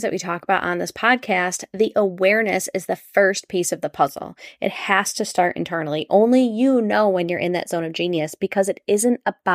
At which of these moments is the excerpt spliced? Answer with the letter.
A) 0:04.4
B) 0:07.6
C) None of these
C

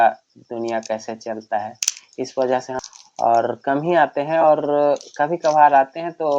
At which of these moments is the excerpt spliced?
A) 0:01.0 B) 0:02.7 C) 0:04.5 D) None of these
B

